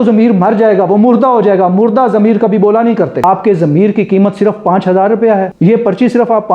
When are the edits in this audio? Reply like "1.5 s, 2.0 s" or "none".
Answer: 3.2 s, 5.5 s